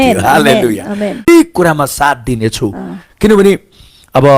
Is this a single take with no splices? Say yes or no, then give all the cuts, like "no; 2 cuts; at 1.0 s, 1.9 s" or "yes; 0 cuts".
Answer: no; 1 cut; at 1.3 s